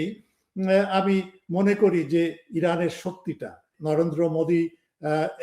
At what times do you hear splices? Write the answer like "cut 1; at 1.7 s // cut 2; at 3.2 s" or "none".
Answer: cut 1; at 3.7 s

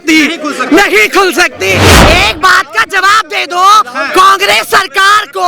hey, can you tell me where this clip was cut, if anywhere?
cut 1; at 1.9 s

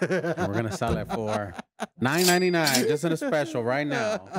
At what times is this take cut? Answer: none

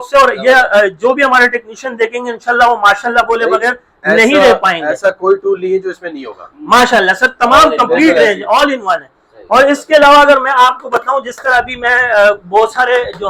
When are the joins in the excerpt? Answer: none

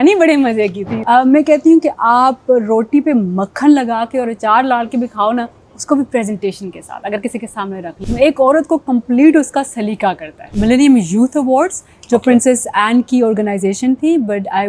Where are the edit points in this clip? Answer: cut 1; at 0.9 s // cut 2; at 8.0 s // cut 3; at 10.5 s

